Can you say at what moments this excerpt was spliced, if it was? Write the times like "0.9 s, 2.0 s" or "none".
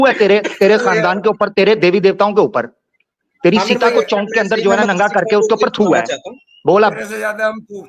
2.8 s

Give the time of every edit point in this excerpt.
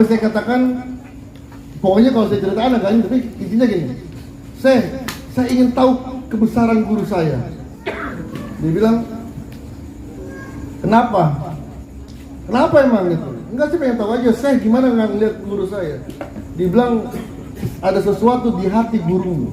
none

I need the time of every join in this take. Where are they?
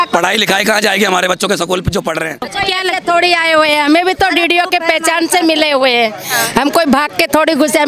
2.6 s

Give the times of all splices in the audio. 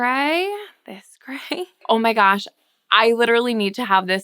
1.8 s

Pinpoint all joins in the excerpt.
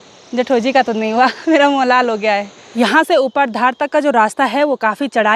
none

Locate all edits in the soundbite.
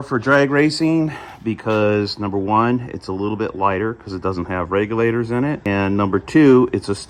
none

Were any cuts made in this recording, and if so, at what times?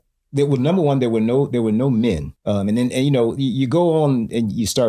2.3 s

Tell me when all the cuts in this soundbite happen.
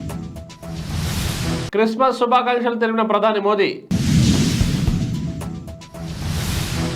1.2 s

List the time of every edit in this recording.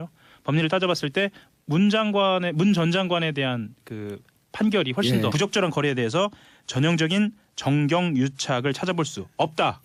none

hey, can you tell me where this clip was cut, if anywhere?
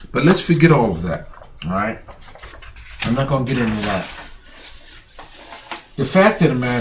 none

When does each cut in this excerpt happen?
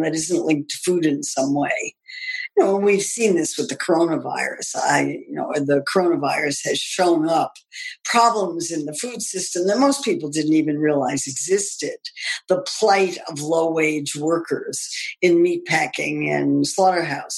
none

